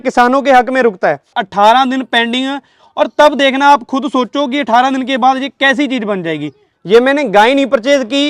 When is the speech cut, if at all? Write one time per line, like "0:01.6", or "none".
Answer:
0:01.4
0:06.7